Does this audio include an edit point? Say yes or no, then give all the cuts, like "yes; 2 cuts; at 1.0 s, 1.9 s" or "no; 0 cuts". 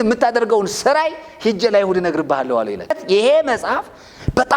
yes; 1 cut; at 3.0 s